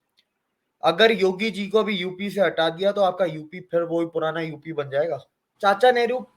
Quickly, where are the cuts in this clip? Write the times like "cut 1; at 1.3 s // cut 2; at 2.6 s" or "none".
cut 1; at 5.4 s